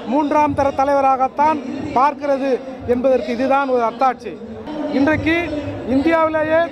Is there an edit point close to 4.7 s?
yes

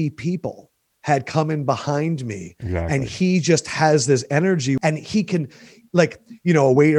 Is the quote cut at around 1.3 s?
no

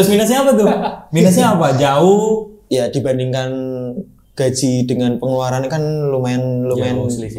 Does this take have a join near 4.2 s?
no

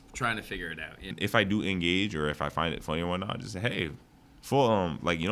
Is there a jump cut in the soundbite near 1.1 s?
yes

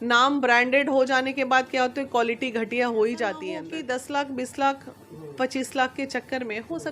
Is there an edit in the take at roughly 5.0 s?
no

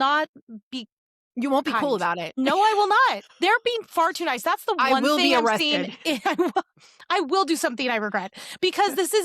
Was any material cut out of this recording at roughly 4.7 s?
no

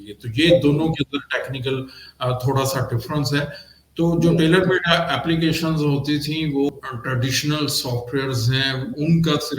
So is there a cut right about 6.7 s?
yes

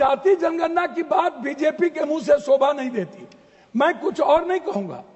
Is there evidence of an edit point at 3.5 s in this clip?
no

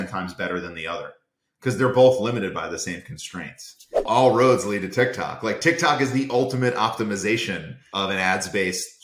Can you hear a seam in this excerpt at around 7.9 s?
yes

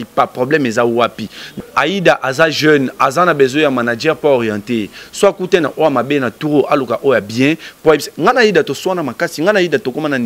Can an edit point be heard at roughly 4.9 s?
no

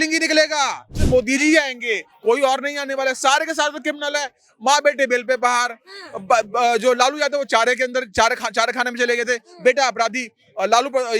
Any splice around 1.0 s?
yes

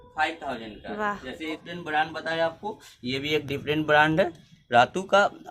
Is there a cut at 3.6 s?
no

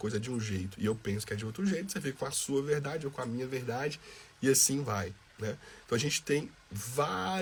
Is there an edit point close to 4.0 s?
no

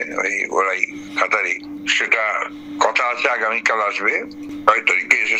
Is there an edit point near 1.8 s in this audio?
no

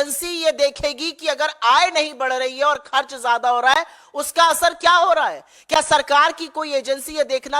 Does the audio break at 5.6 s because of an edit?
no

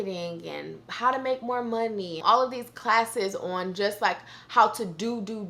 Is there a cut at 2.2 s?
yes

